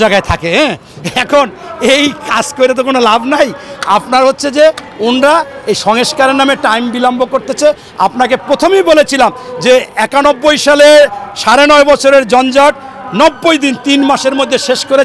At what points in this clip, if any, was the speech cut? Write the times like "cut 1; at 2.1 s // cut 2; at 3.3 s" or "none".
none

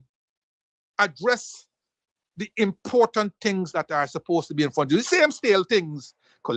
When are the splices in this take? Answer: none

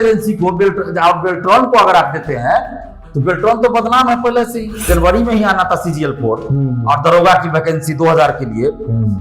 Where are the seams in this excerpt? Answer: cut 1; at 4.8 s

